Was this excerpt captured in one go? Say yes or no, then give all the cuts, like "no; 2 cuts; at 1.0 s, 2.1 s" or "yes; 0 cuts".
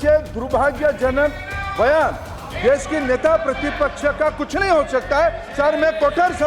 yes; 0 cuts